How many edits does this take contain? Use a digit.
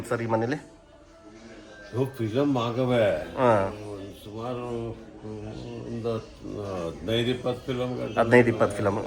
0